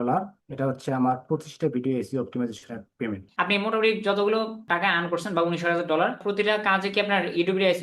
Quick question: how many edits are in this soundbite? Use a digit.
2